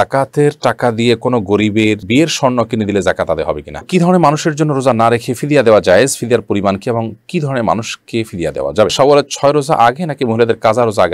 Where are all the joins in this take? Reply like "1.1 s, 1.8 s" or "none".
3.9 s, 8.9 s